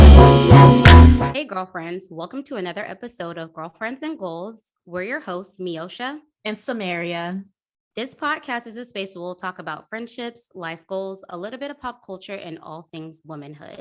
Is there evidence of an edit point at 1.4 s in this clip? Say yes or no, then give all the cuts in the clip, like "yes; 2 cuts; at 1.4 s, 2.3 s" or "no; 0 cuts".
yes; 1 cut; at 1.4 s